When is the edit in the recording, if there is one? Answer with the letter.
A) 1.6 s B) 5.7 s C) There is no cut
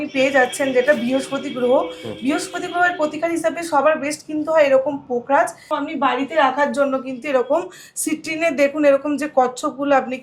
B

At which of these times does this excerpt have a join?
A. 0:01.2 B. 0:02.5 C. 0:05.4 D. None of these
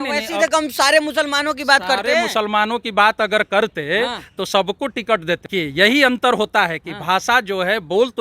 C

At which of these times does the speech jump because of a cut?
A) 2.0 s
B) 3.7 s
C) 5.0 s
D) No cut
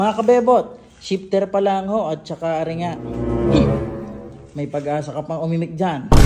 D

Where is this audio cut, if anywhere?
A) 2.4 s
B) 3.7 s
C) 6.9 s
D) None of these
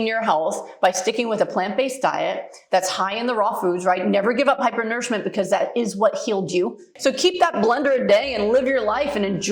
C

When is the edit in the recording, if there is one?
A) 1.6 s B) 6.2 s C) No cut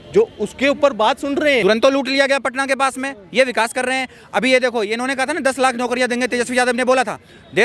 A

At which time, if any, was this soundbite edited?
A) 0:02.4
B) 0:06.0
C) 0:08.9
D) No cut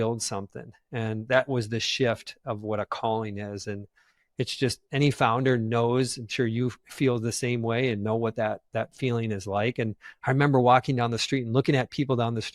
D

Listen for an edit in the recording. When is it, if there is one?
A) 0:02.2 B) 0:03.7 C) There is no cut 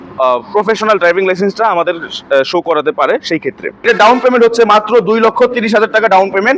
B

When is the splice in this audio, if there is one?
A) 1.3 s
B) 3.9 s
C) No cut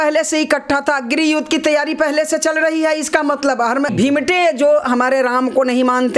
B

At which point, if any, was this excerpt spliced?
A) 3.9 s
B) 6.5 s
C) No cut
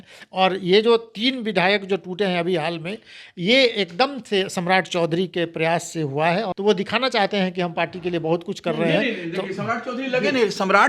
B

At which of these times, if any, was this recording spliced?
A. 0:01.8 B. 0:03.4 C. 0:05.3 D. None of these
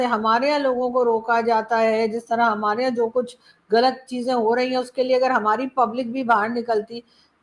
D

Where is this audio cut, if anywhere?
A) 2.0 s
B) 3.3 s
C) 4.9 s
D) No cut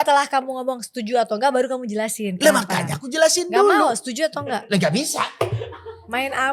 D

